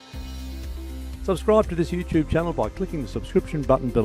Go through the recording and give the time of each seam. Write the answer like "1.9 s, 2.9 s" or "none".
1.3 s